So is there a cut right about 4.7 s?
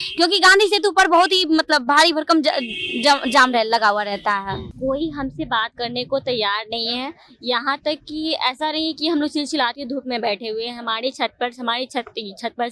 yes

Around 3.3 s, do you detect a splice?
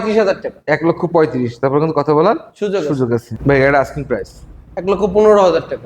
yes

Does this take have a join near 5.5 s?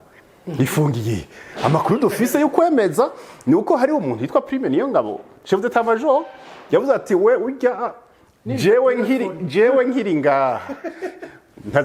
no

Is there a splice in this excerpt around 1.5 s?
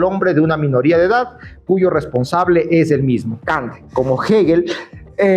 no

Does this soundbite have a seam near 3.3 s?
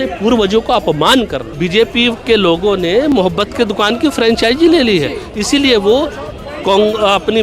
no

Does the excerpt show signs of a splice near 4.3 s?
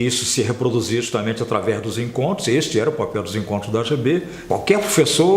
yes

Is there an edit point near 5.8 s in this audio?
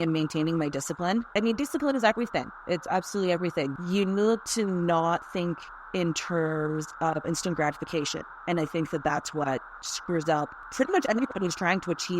no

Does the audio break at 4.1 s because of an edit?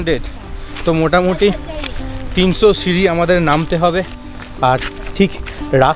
yes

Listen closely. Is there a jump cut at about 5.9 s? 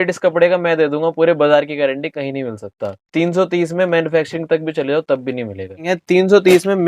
yes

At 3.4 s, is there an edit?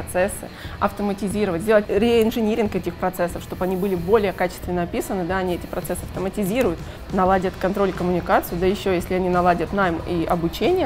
no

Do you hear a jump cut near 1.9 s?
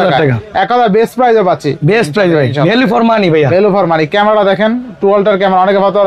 no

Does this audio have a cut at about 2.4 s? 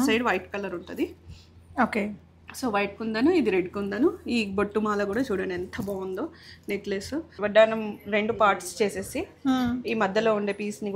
no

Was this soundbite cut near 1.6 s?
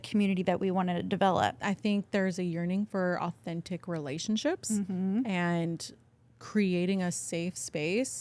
yes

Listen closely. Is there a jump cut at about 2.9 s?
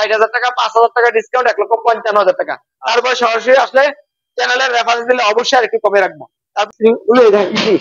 no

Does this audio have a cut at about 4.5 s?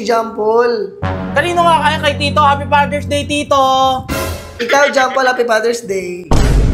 yes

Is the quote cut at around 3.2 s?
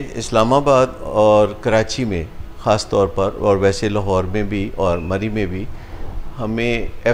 no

